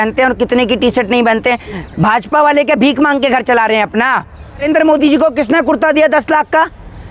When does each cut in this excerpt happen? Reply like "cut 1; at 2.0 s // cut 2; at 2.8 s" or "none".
cut 1; at 4.6 s

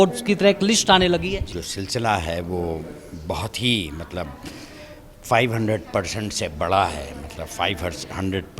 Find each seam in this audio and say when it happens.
cut 1; at 1.4 s

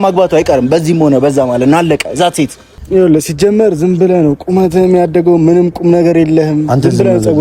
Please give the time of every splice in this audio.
cut 1; at 2.7 s

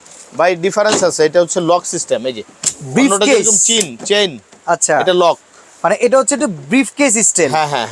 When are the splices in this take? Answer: none

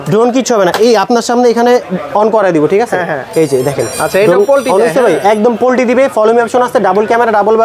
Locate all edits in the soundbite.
none

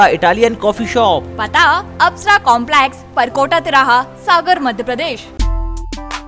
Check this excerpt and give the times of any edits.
cut 1; at 5.3 s

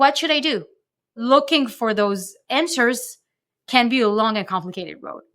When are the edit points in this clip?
cut 1; at 1.2 s // cut 2; at 3.6 s

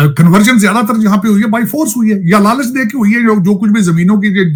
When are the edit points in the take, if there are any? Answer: none

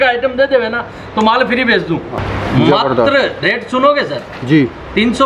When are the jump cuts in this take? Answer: cut 1; at 2.1 s

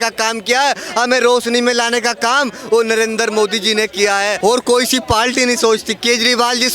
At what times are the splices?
cut 1; at 4.3 s

